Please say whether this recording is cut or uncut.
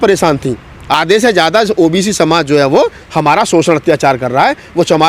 cut